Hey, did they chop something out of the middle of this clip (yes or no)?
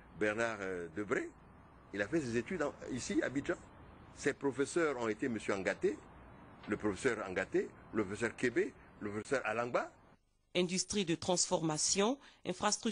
no